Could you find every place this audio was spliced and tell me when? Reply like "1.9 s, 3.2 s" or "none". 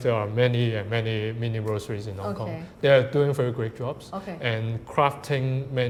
none